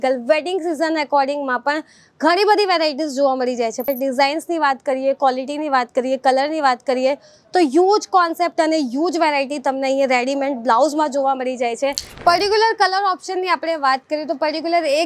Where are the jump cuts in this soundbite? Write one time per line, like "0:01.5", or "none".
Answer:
0:03.9
0:12.1

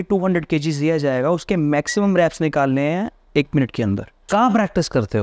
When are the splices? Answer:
0:04.3

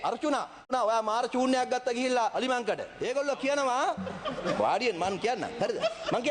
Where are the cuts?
0:00.7
0:02.4

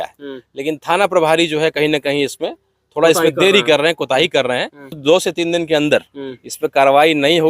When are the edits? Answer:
0:05.0

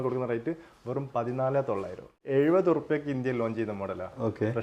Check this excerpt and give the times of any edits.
0:02.2

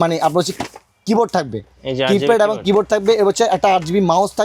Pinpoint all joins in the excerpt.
none

